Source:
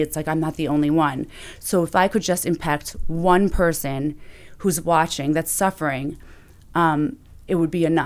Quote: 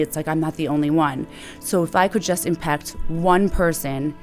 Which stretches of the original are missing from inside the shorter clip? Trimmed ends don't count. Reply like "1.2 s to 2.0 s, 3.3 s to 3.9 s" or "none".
none